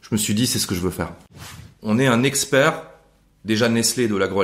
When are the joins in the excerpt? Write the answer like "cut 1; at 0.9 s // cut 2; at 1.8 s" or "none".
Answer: cut 1; at 1.3 s